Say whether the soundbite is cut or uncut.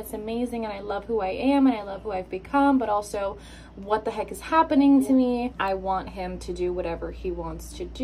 cut